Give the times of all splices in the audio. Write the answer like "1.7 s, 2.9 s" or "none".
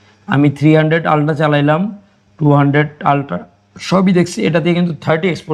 none